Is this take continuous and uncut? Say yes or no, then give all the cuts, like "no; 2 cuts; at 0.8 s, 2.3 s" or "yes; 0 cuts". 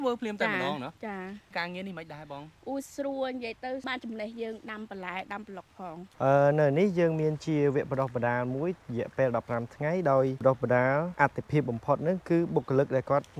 no; 1 cut; at 6.0 s